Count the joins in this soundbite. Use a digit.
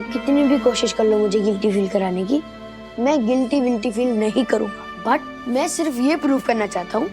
1